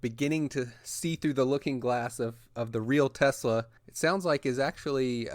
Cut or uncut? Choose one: cut